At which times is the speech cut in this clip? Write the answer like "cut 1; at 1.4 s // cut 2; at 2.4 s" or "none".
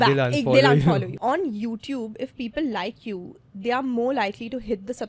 cut 1; at 1.1 s

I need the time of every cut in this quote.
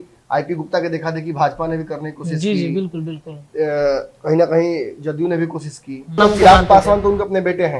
cut 1; at 6.2 s

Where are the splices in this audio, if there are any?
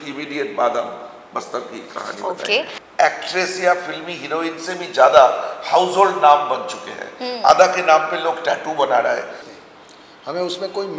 cut 1; at 2.8 s // cut 2; at 9.4 s

